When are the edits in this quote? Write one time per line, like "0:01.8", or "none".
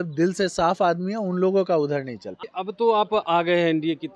0:02.4